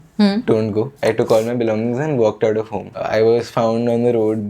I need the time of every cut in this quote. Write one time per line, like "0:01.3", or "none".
0:00.9
0:03.0